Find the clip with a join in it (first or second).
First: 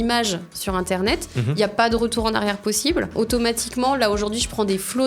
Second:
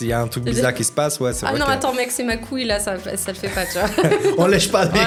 first